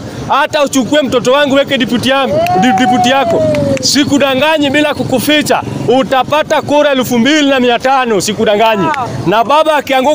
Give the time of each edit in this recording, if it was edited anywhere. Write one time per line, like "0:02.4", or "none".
0:09.1